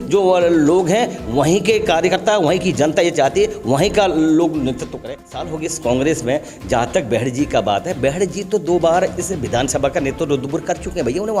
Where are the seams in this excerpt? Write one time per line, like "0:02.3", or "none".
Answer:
0:05.2